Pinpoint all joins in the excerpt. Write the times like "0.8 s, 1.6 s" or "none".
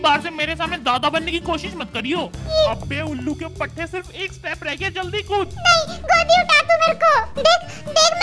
2.5 s